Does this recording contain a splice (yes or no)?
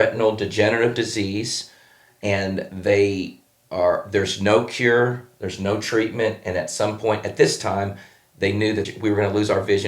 yes